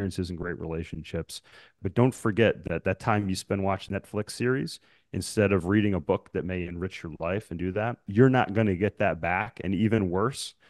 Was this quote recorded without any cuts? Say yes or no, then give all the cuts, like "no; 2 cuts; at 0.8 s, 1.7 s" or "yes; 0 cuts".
no; 3 cuts; at 1.7 s, 3.8 s, 8.0 s